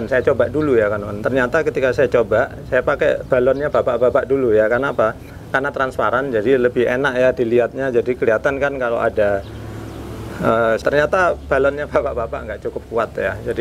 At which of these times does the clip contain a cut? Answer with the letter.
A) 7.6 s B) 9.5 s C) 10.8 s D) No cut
C